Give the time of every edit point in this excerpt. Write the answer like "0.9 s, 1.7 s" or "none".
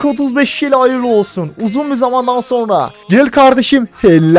3.0 s